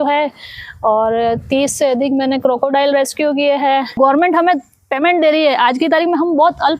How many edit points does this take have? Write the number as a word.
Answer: one